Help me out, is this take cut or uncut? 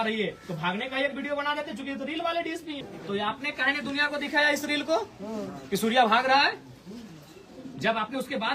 cut